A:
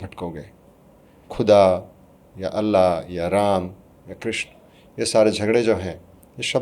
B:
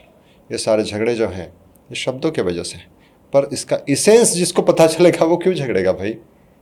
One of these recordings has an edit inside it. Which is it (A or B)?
A